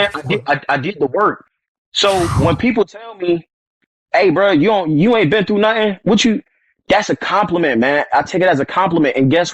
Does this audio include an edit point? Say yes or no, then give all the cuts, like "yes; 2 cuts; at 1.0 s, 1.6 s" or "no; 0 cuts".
no; 0 cuts